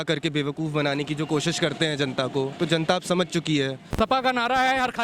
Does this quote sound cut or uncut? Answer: cut